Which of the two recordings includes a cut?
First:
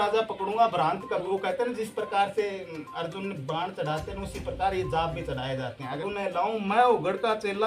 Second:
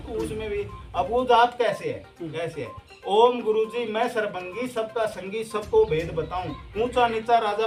first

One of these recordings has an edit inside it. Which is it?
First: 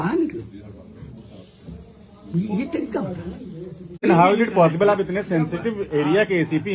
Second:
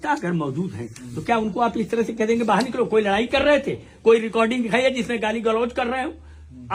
first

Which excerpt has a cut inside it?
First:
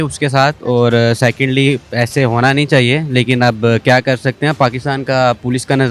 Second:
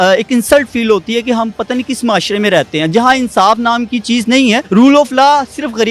second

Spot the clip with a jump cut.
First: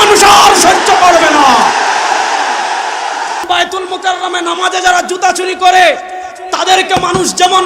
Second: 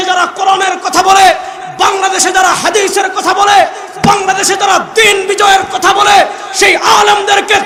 first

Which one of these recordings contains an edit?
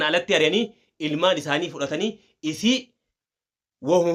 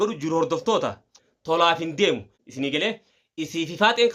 second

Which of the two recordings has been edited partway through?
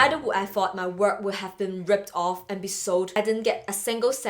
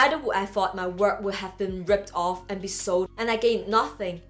first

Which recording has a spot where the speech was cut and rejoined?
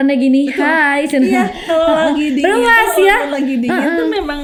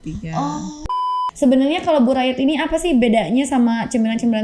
second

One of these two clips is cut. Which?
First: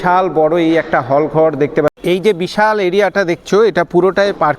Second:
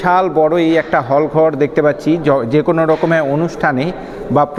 first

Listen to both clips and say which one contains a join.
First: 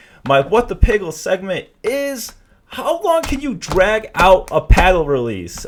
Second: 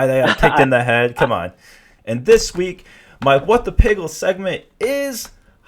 second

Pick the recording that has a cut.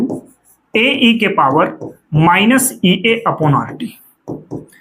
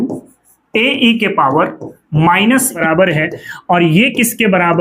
second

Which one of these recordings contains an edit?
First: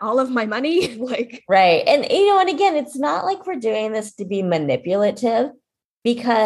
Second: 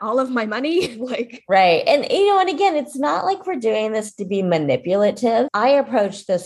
second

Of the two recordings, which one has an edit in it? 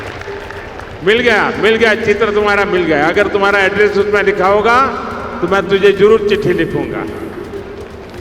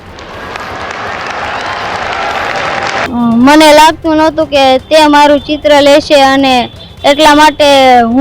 second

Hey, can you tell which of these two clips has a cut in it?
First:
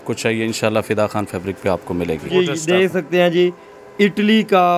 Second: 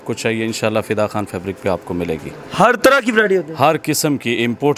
first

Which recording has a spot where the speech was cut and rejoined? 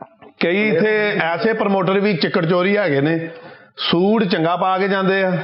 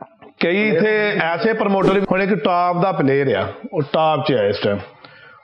second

